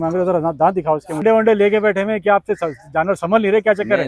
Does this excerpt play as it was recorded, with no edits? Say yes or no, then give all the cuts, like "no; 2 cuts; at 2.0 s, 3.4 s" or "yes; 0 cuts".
no; 1 cut; at 1.2 s